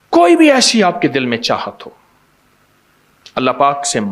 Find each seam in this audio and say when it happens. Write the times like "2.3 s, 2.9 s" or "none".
none